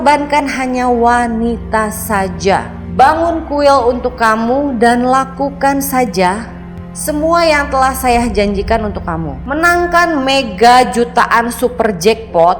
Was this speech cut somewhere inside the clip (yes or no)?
no